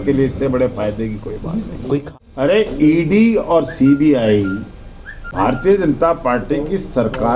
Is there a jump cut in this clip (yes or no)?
yes